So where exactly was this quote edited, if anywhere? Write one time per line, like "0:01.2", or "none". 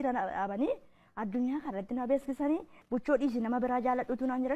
0:02.8